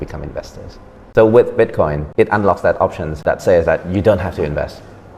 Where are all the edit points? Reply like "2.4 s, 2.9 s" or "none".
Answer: 1.0 s, 2.0 s, 3.2 s